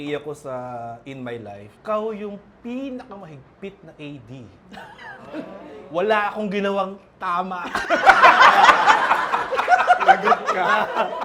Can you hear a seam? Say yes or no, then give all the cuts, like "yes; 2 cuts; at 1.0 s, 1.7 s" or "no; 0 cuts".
no; 0 cuts